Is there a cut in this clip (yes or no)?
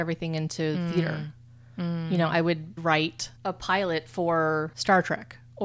yes